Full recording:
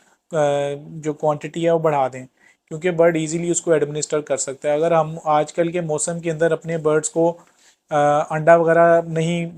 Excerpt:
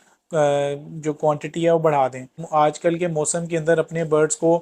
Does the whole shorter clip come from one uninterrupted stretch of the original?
no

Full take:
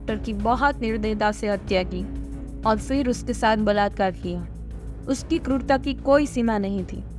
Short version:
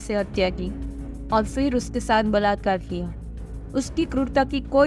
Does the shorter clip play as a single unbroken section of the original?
yes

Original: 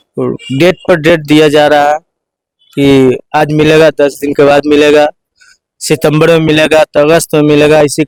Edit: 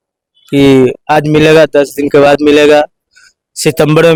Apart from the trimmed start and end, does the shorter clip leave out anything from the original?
no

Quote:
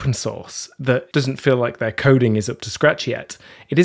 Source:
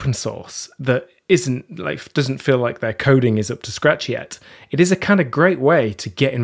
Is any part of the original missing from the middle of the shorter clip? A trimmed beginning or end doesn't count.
yes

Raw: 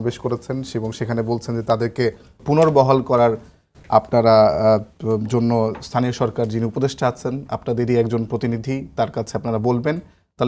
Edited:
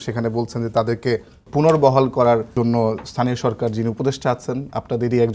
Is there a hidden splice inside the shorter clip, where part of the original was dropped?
yes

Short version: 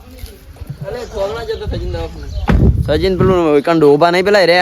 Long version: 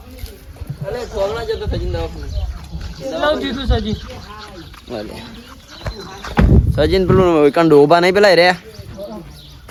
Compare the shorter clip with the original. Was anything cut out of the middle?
yes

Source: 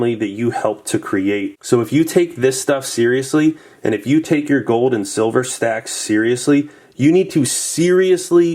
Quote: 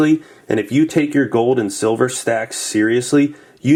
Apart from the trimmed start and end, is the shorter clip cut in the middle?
no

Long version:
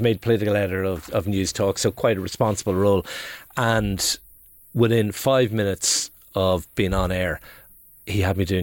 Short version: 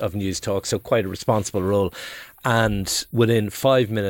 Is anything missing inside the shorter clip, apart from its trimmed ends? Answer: yes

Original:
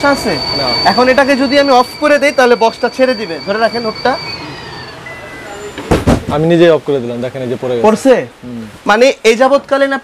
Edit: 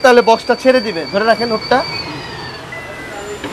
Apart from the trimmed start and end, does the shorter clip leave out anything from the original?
no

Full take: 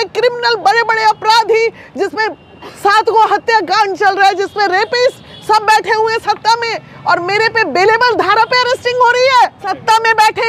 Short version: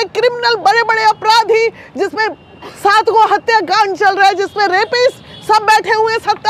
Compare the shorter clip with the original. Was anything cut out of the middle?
no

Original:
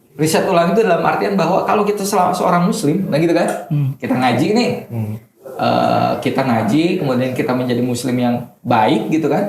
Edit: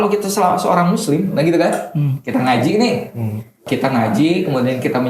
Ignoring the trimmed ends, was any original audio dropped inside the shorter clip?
yes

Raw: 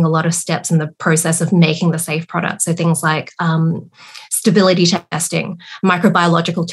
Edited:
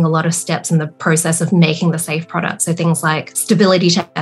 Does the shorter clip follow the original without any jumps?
no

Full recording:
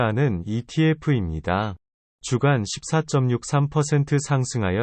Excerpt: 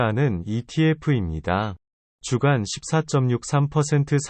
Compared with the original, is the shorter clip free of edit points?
yes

